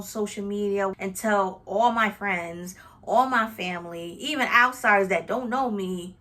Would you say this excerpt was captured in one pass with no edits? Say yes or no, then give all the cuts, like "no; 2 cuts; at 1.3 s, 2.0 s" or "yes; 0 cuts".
no; 1 cut; at 0.9 s